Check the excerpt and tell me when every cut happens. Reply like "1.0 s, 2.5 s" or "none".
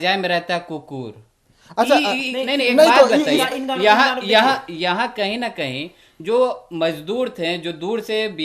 none